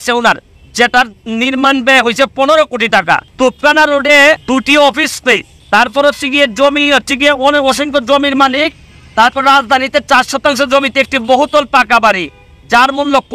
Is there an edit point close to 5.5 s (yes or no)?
yes